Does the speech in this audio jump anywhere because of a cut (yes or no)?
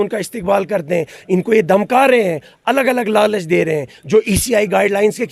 no